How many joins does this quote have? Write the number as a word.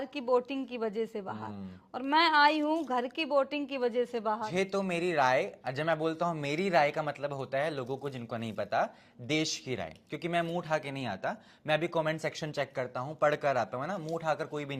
one